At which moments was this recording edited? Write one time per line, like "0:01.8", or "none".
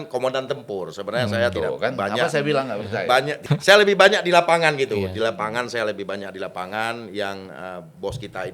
0:03.4